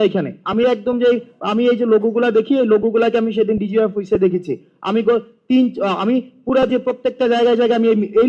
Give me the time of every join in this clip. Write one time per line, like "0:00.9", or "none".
none